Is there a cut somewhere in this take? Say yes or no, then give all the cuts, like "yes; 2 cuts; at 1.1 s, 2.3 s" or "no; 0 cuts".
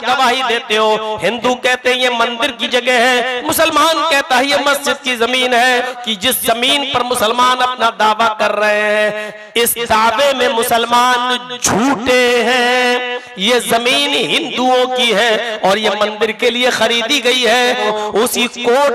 yes; 2 cuts; at 5.9 s, 17.9 s